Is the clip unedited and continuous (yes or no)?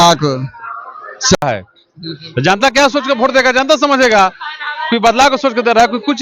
no